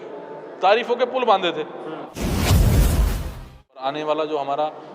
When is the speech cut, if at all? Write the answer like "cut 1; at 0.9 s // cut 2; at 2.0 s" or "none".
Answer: cut 1; at 2.1 s // cut 2; at 3.8 s